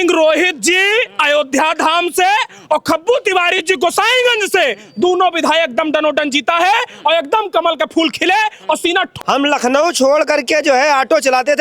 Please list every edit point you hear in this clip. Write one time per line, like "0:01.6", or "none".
0:09.1